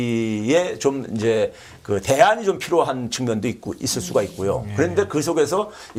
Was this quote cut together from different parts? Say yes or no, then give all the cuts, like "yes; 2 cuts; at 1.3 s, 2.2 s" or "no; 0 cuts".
no; 0 cuts